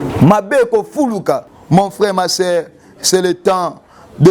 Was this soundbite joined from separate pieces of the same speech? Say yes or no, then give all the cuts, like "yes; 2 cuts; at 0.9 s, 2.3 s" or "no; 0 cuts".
yes; 1 cut; at 1.5 s